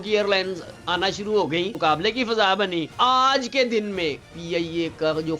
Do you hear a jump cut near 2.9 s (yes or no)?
yes